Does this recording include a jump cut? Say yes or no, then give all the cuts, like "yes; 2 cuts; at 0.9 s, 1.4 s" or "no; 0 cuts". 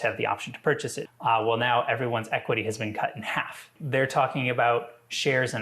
yes; 2 cuts; at 1.1 s, 3.7 s